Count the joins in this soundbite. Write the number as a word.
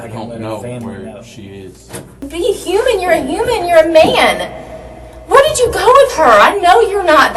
one